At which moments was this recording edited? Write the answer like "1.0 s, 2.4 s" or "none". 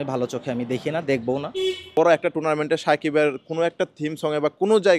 1.9 s